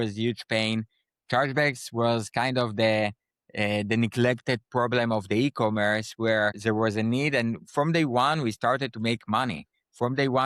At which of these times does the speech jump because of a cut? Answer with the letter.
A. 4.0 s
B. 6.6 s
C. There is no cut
B